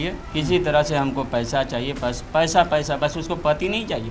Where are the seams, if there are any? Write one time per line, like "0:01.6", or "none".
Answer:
none